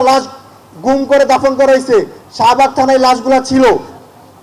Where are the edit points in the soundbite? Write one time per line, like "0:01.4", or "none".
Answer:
0:02.2